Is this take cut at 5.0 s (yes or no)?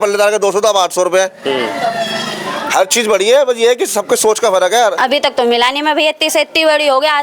yes